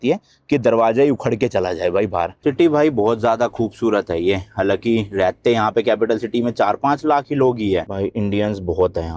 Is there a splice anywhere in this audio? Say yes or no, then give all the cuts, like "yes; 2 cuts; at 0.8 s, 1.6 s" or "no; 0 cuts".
yes; 2 cuts; at 2.4 s, 7.9 s